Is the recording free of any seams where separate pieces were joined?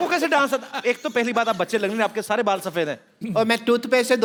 yes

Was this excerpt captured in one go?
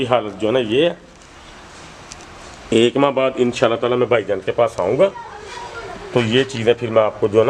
yes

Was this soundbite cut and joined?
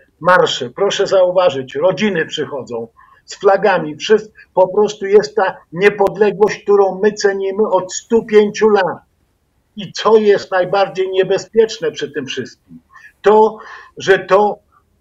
no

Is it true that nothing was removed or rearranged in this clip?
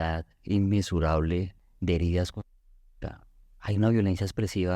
no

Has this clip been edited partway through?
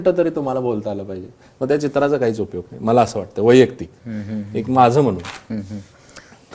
no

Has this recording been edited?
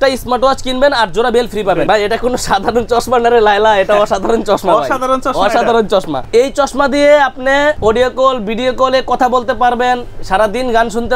yes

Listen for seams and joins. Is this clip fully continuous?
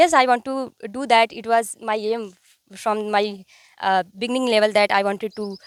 yes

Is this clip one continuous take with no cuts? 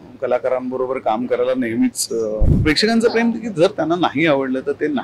no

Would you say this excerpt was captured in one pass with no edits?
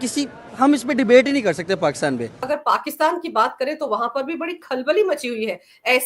no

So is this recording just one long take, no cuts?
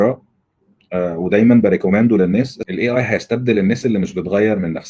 no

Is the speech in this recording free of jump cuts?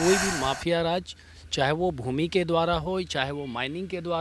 yes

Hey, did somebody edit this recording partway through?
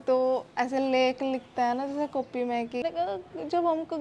yes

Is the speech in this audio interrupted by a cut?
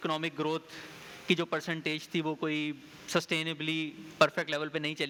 no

